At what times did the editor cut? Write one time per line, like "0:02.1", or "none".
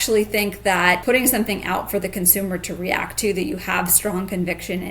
0:01.0